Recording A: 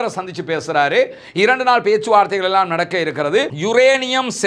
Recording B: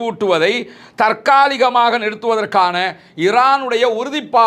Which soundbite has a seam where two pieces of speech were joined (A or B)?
A